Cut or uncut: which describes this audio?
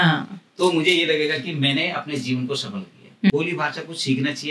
cut